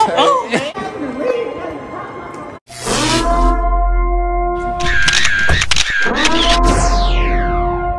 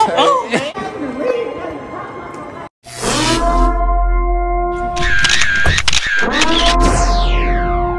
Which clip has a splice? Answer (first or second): first